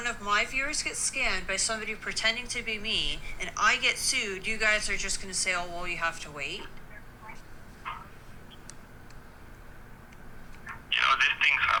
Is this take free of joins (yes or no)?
yes